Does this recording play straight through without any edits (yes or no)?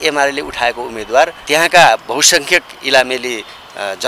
no